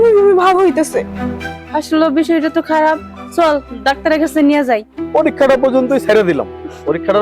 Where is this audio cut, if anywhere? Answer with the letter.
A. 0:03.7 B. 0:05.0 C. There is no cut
B